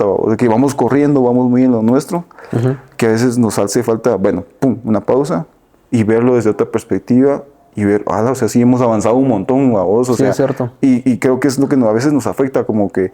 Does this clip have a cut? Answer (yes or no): no